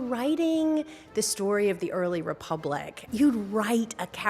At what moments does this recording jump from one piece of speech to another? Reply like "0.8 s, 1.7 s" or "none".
2.9 s